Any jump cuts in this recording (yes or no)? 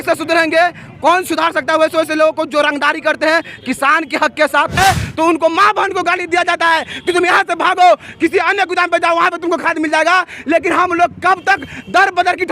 yes